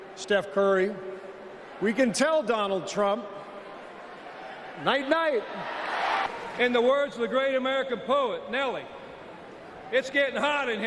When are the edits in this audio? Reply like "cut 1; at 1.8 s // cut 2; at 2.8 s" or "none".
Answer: cut 1; at 6.2 s